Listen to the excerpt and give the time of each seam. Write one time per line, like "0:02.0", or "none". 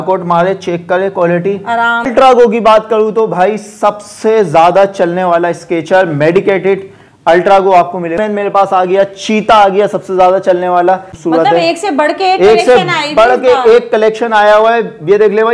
0:02.1
0:08.2
0:11.1